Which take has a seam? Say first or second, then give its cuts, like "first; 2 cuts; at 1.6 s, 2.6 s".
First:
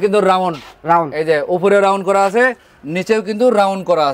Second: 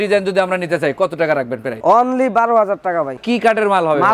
second; 1 cut; at 3.2 s